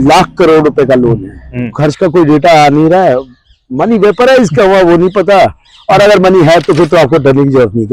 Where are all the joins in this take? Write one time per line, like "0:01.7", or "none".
0:01.6

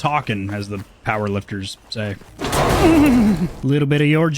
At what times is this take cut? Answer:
0:02.2
0:03.5

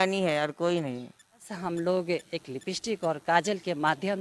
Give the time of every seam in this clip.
0:01.5

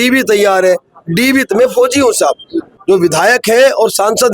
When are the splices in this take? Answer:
0:02.7

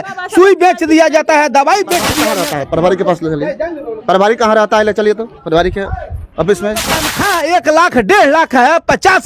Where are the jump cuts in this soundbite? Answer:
0:02.2
0:07.2

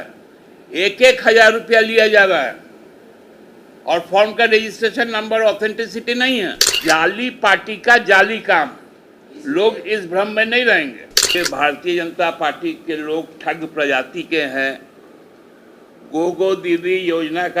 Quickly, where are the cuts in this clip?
0:06.7
0:11.4

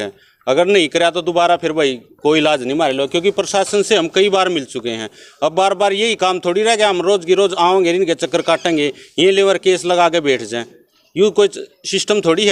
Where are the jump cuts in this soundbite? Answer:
none

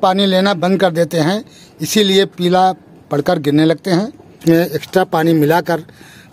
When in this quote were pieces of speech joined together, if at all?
0:04.4

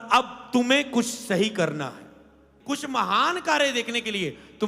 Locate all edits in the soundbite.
0:02.5

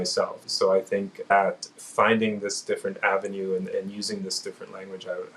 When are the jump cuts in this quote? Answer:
0:01.3

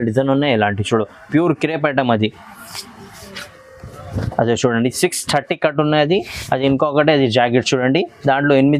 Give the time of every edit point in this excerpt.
none

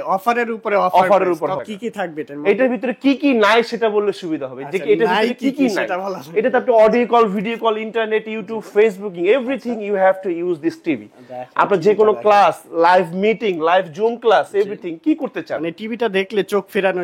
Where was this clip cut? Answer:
0:01.6

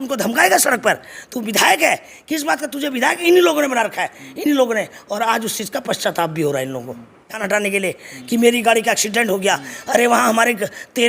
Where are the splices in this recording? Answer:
0:07.4

